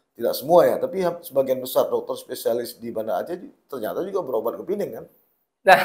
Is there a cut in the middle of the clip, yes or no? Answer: no